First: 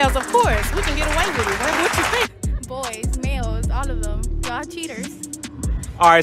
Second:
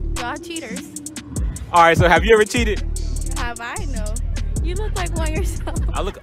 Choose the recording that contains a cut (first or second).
first